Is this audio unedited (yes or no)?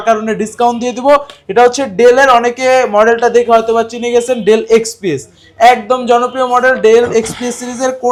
yes